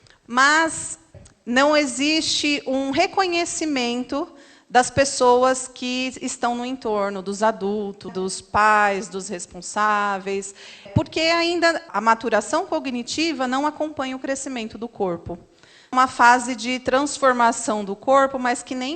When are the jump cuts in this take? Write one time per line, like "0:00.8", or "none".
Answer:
0:01.1
0:08.1
0:10.9
0:11.9
0:15.9